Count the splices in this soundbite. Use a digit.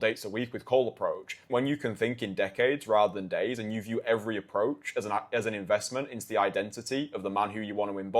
1